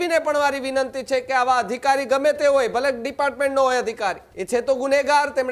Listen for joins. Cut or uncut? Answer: cut